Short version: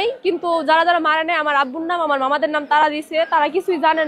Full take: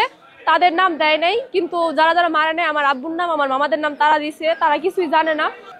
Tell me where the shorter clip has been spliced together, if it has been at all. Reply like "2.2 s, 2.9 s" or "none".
none